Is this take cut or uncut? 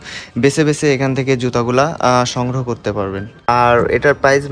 cut